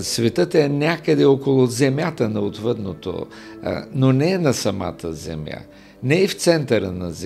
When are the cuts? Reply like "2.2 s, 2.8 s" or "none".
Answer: none